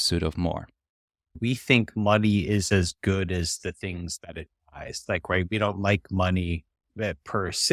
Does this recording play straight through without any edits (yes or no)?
no